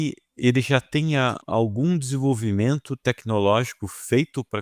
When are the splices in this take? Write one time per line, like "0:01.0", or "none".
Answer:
0:01.4